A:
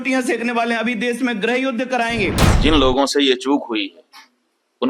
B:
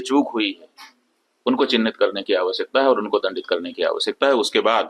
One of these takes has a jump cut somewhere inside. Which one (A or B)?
A